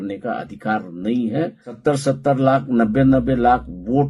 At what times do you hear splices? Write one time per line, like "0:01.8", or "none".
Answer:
0:01.8